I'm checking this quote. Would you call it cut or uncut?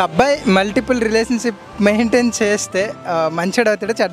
uncut